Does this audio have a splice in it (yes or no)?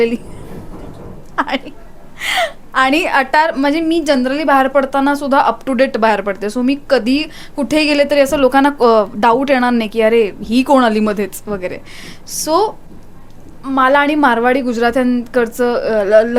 no